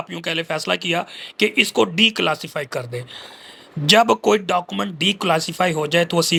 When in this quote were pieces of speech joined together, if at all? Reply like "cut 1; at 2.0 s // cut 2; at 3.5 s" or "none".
none